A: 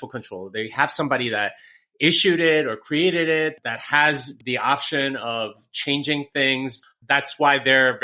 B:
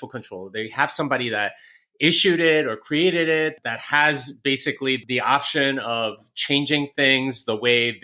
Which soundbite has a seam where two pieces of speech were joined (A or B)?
A